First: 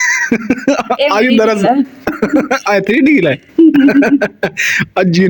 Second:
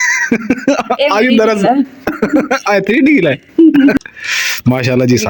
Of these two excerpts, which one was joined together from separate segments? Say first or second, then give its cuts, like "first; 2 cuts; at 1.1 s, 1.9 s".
second; 1 cut; at 4.0 s